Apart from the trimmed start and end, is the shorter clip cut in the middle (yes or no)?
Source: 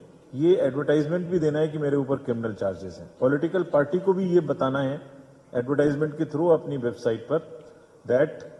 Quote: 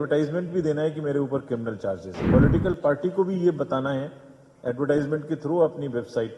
yes